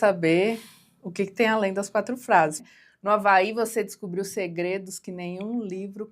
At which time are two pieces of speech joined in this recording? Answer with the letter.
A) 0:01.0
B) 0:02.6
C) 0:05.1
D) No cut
B